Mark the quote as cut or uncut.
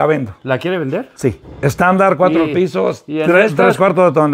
cut